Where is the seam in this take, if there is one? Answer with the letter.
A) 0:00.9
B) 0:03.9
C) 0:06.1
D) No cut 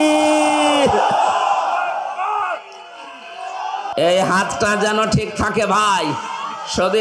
B